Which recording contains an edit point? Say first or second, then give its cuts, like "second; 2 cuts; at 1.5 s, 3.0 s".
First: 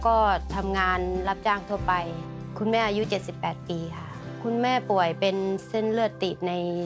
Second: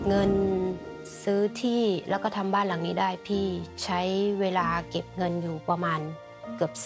first; 1 cut; at 2.3 s